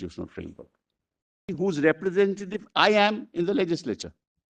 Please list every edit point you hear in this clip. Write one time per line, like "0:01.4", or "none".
0:01.5